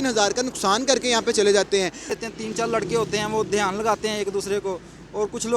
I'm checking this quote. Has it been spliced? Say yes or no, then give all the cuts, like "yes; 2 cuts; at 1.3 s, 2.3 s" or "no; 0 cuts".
yes; 1 cut; at 2.1 s